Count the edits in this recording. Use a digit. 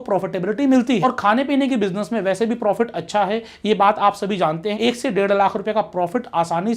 2